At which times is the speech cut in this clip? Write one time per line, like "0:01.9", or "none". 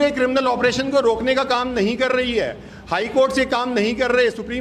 none